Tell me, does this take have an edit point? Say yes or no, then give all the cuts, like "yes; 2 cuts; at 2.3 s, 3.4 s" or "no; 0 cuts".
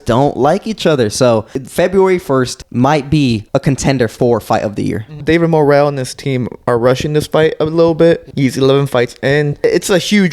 yes; 6 cuts; at 1.6 s, 2.6 s, 3.4 s, 5.2 s, 8.3 s, 9.6 s